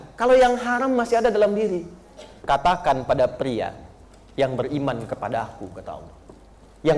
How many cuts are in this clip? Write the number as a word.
one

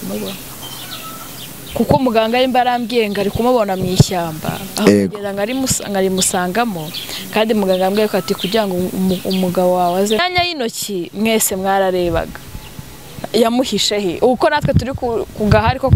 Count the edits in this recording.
one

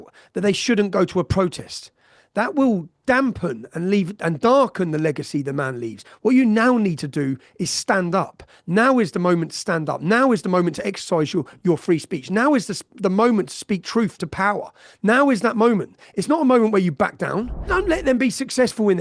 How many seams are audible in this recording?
one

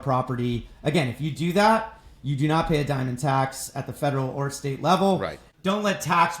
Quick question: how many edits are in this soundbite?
one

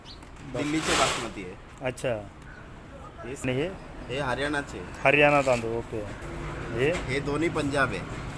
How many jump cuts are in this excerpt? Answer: two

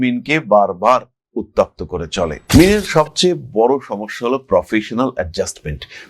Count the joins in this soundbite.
one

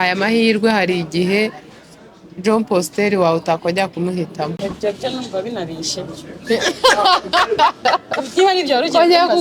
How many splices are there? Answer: one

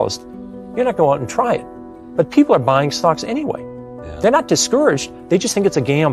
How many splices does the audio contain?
zero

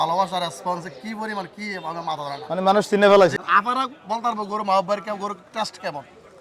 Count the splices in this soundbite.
one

